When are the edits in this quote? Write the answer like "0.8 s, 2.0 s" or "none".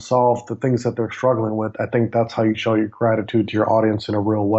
none